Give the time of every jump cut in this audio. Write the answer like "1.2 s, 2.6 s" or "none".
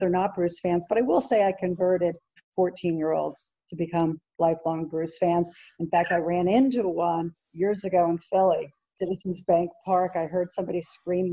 9.0 s